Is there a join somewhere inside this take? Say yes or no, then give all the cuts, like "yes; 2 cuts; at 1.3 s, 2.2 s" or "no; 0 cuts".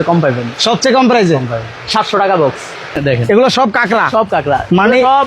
yes; 1 cut; at 3.0 s